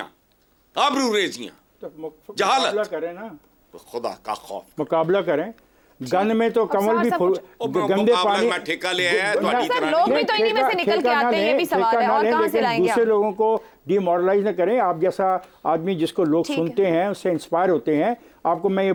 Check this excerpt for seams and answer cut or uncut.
uncut